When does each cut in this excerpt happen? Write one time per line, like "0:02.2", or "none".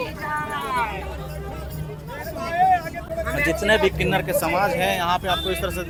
none